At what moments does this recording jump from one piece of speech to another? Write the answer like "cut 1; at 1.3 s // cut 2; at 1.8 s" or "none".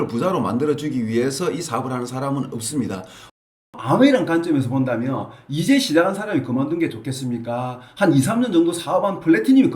cut 1; at 3.3 s